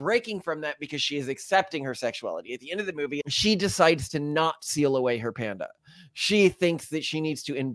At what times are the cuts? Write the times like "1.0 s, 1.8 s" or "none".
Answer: 3.2 s